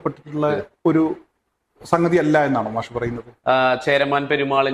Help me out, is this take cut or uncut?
cut